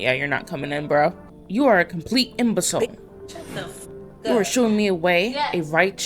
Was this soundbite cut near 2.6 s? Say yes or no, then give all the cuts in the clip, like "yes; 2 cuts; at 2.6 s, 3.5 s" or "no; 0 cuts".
no; 1 cut; at 1.3 s